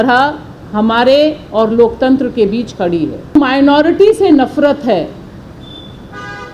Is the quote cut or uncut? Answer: cut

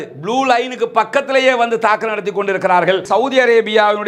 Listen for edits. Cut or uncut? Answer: cut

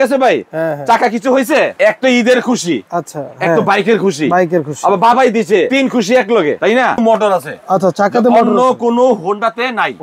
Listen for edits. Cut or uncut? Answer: cut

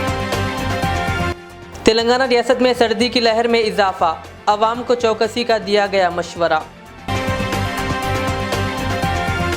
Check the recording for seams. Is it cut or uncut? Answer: cut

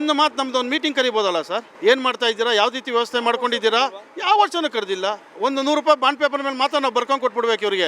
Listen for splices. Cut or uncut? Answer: cut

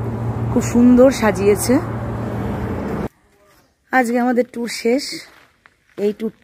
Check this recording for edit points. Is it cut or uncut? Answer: cut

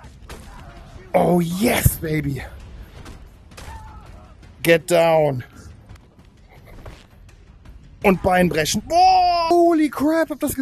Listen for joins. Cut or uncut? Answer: cut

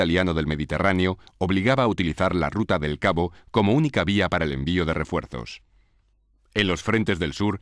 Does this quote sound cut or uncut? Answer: uncut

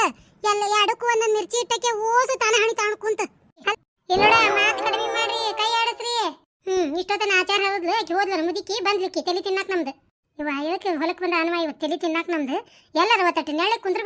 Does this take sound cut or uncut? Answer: cut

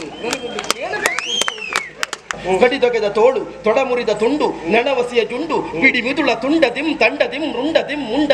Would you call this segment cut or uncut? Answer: cut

